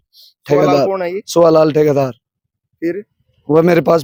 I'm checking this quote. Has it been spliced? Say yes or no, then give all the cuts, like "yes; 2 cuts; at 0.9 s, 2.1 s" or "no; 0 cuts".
no; 0 cuts